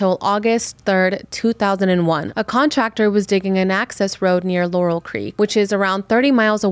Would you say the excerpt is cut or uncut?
cut